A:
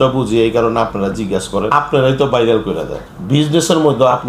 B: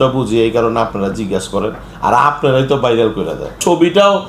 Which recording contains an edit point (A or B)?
A